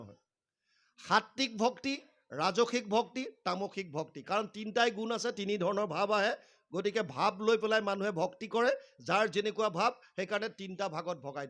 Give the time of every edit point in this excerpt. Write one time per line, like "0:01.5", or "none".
none